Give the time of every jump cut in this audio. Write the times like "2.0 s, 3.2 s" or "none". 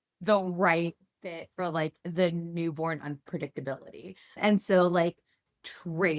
4.4 s